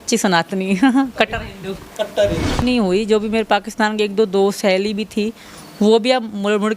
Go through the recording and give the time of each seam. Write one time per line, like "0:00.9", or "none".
0:02.6

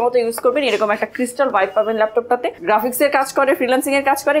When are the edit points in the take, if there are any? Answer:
0:02.5

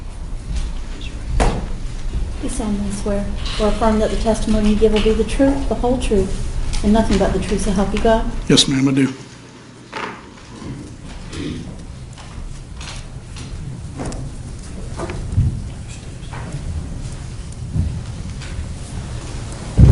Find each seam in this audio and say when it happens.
0:15.2

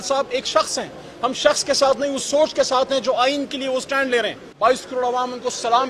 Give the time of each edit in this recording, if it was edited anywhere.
0:04.4

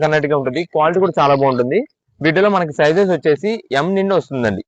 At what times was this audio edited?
none

